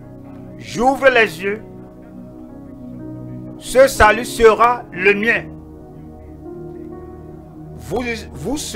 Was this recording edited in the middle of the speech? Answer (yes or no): no